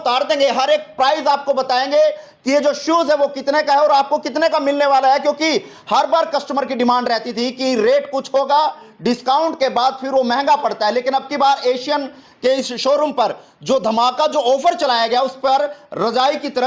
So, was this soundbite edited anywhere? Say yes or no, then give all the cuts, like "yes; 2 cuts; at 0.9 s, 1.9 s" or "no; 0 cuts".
no; 0 cuts